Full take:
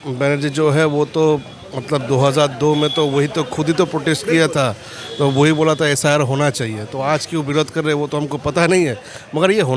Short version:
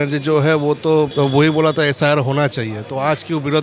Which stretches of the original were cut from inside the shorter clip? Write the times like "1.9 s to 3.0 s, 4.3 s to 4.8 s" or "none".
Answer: 1.4 s to 5.1 s